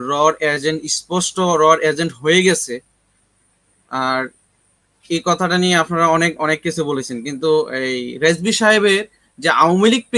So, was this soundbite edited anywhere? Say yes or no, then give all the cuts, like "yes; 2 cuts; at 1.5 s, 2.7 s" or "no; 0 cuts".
no; 0 cuts